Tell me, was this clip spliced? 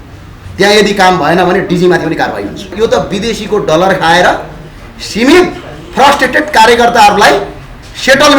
yes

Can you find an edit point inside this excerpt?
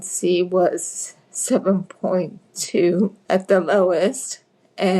yes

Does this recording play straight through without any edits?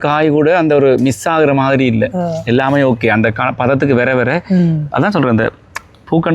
yes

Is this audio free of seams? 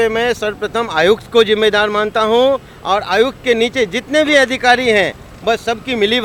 yes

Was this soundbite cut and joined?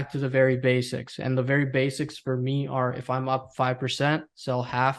no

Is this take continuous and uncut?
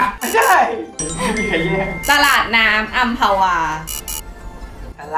yes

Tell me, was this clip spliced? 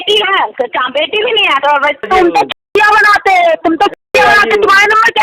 yes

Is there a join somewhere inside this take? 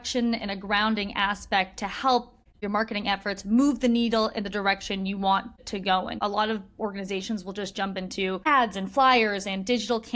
yes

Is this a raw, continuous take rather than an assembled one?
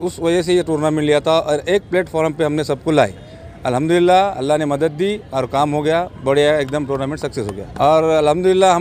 no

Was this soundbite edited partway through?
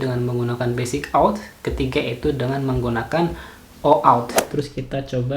yes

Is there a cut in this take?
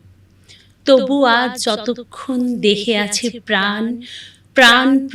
no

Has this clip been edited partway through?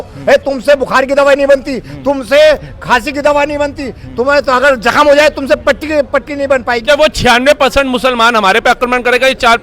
yes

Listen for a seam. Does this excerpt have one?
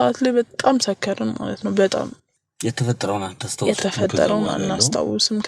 yes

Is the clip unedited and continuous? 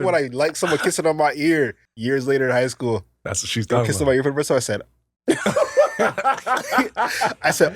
no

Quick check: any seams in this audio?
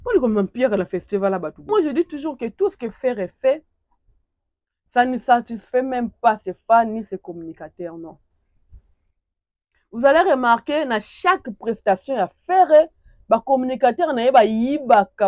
yes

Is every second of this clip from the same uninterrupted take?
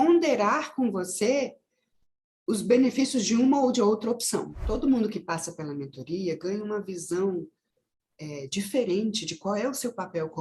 no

